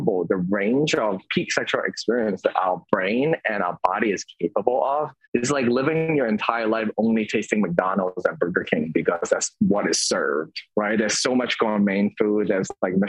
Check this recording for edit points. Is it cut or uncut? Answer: cut